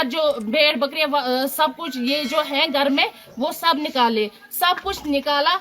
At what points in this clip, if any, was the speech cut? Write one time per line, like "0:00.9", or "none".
none